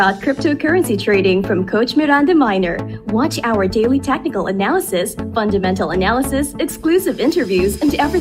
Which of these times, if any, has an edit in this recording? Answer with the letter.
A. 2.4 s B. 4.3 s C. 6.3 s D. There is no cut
D